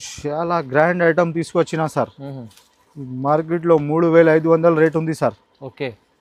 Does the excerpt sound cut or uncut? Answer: uncut